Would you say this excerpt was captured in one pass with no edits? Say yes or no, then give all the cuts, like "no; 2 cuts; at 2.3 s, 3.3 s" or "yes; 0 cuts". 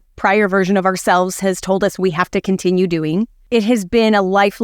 no; 1 cut; at 3.4 s